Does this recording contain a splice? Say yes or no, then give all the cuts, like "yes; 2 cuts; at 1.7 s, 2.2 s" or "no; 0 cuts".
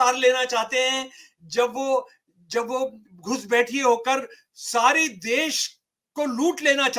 no; 0 cuts